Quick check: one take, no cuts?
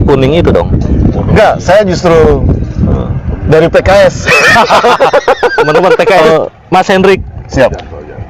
no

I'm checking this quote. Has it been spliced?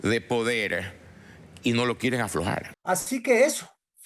no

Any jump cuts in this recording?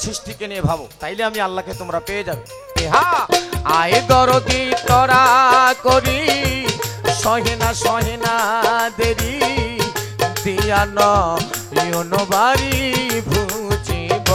yes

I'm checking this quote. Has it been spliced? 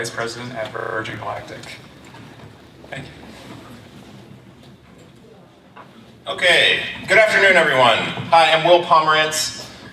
no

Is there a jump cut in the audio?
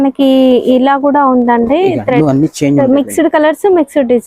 yes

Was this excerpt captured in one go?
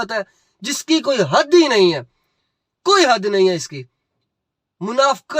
yes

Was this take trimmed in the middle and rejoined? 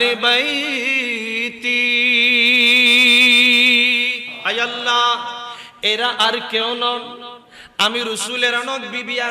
yes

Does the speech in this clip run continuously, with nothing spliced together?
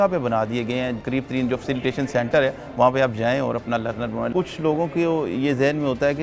no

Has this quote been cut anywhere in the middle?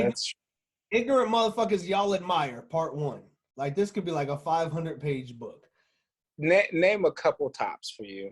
yes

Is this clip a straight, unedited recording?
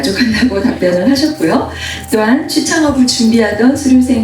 yes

